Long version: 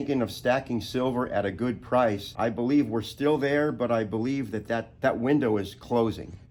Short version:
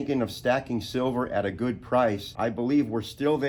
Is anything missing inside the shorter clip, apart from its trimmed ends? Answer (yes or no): no